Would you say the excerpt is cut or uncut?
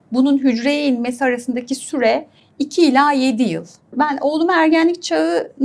cut